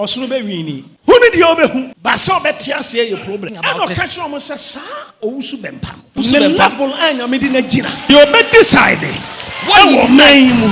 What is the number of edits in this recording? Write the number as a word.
five